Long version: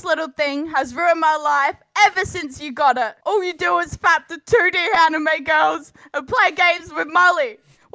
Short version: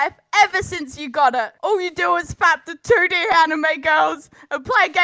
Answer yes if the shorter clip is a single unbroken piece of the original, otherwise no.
yes